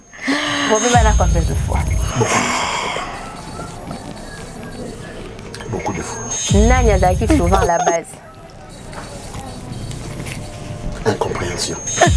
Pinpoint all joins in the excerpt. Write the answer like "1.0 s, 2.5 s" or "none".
6.3 s

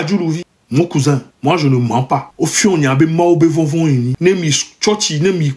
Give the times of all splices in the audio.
1.3 s, 2.3 s, 4.1 s

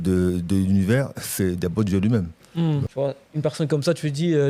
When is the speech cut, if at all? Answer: 2.8 s

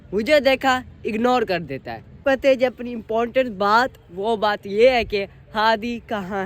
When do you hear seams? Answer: 2.2 s

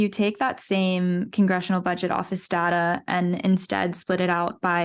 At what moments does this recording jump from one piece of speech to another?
none

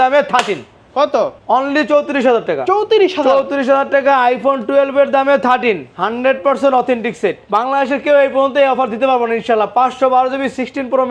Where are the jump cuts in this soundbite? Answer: 1.4 s, 7.4 s

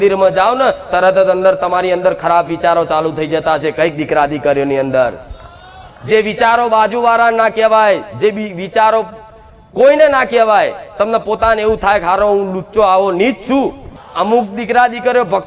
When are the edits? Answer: 13.8 s

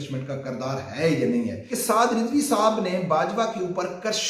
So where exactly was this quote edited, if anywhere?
1.6 s

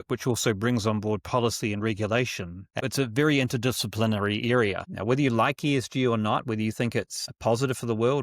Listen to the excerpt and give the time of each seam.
2.8 s, 4.8 s, 7.2 s

